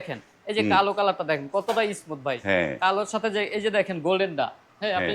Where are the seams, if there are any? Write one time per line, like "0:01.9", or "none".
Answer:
none